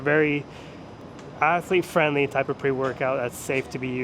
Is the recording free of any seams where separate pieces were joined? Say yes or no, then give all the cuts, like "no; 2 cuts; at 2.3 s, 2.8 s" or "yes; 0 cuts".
yes; 0 cuts